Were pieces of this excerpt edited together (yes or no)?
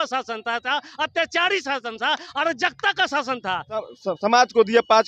yes